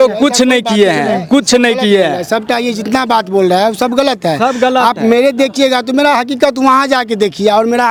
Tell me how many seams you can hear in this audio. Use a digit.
0